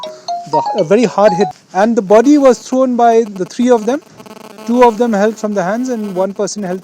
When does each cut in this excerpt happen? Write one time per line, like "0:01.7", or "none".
0:01.5